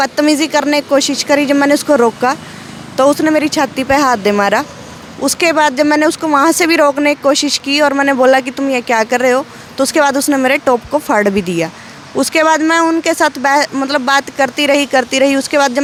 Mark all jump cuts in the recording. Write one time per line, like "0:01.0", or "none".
none